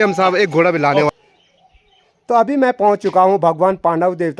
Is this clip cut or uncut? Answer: cut